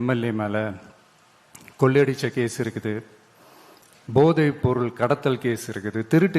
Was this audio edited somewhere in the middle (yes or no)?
no